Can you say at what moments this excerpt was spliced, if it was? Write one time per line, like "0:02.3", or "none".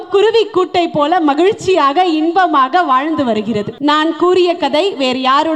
0:03.7

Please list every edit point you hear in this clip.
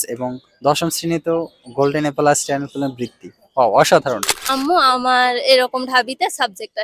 0:04.3

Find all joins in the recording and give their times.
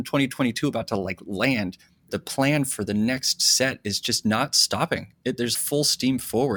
0:02.1
0:05.5

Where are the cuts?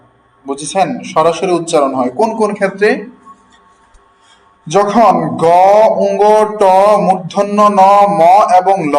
none

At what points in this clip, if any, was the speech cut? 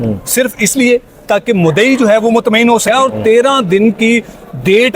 0:02.8

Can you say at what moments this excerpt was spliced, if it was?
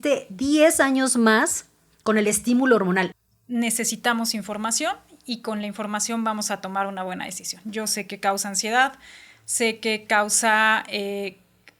0:03.2

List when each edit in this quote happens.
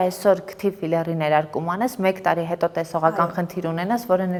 none

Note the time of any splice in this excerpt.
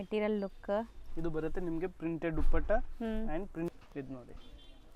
0:03.7

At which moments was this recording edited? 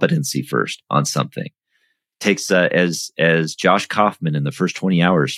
none

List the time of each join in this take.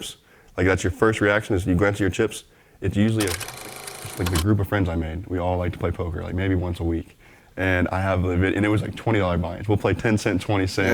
0:03.6

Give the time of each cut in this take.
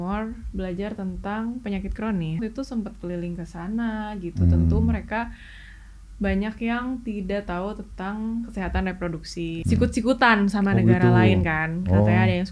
0:02.4
0:09.6

